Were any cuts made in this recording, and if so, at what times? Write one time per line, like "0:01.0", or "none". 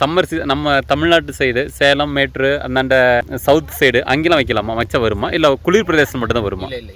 0:03.3